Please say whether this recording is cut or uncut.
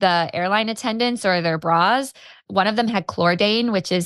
cut